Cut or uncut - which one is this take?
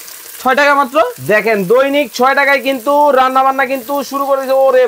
uncut